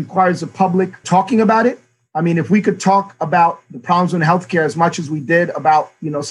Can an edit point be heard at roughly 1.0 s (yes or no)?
yes